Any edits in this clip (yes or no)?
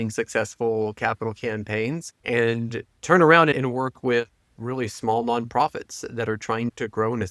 yes